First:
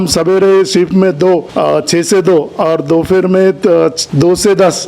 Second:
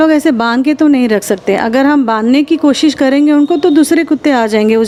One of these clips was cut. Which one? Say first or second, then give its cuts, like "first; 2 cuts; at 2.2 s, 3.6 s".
first; 2 cuts; at 1.5 s, 4.0 s